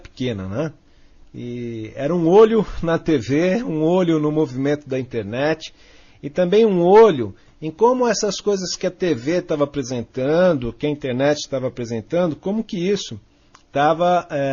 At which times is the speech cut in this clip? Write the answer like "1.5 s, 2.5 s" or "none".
12.8 s